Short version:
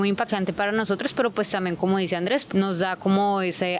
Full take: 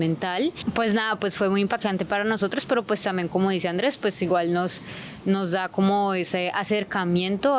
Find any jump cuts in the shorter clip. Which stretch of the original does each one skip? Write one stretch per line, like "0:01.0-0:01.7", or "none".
0:04.0-0:05.2